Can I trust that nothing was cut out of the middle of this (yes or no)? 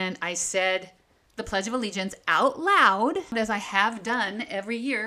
no